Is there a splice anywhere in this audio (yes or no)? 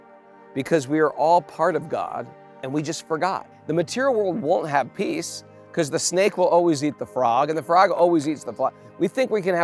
yes